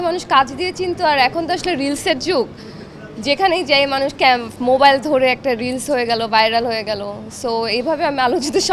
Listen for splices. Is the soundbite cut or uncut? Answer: uncut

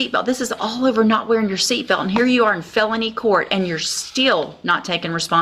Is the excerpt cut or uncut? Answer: uncut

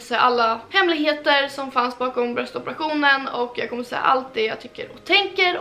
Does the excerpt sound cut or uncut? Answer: uncut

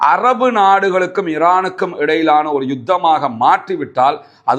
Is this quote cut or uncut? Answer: uncut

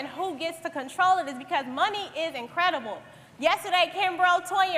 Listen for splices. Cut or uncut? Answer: uncut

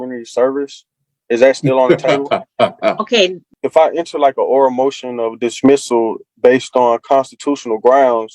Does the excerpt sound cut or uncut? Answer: cut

